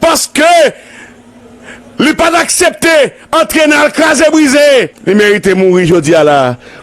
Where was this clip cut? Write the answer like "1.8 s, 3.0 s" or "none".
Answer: 4.9 s